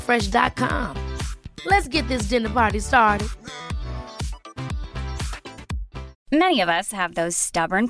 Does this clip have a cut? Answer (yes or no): yes